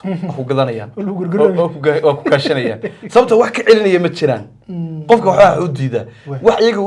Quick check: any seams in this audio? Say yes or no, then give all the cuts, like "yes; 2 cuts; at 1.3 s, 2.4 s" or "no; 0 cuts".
no; 0 cuts